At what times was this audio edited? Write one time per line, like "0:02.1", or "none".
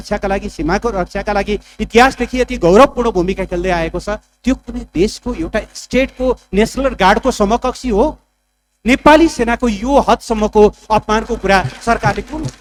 none